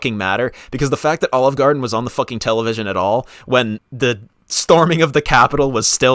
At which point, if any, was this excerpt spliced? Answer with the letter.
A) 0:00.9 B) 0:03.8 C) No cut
B